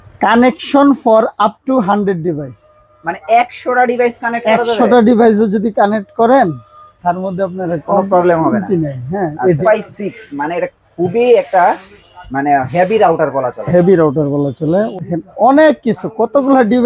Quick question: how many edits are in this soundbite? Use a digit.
2